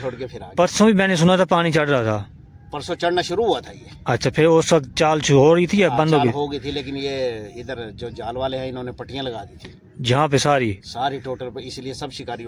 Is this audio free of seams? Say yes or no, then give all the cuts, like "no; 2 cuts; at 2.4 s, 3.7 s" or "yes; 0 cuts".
yes; 0 cuts